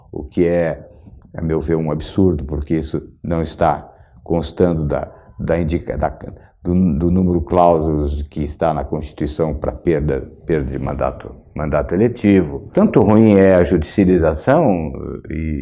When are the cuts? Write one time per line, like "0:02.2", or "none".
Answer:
0:12.6